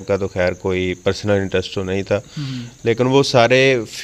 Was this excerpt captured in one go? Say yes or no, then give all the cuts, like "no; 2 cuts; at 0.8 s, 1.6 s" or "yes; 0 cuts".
yes; 0 cuts